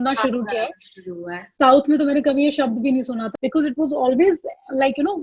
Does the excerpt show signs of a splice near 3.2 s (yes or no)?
yes